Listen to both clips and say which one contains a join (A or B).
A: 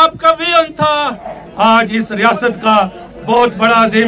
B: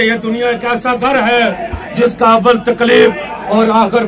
A